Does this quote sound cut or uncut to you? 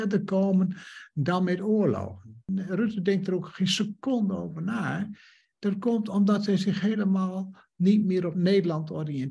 cut